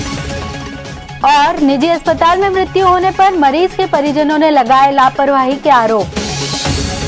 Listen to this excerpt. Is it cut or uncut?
uncut